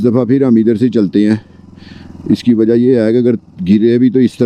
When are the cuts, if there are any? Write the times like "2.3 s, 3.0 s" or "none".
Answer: none